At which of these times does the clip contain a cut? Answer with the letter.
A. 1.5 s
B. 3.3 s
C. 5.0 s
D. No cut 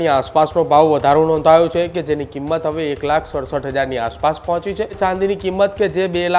C